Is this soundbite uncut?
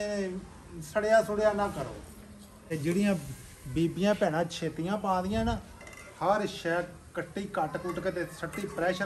no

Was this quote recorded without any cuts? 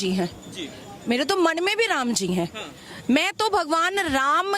yes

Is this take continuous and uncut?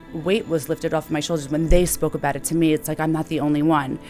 yes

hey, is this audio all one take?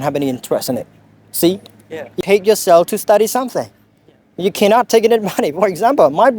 no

